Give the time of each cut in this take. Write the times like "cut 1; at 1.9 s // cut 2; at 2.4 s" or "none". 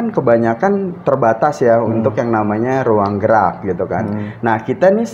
none